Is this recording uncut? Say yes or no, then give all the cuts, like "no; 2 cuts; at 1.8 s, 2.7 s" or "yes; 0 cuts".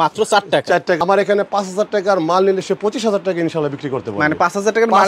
no; 1 cut; at 1.0 s